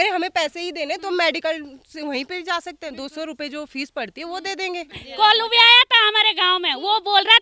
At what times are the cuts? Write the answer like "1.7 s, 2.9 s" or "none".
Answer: 5.0 s